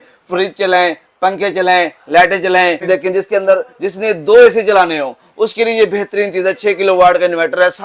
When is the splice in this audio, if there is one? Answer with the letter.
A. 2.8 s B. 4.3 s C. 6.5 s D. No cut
A